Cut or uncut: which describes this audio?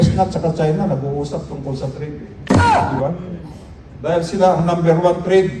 uncut